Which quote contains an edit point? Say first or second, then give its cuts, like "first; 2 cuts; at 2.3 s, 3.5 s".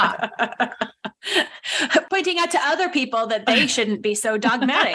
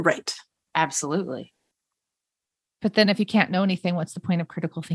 first; 1 cut; at 2.1 s